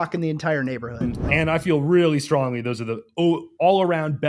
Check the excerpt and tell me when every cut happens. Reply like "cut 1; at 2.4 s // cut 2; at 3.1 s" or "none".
cut 1; at 1.0 s